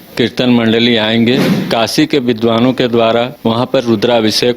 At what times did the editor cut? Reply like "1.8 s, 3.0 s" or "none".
1.5 s, 3.3 s